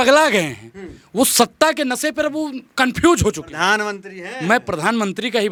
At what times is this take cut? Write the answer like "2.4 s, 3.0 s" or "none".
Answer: none